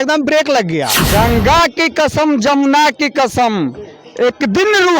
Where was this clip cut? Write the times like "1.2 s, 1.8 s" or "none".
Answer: 1.0 s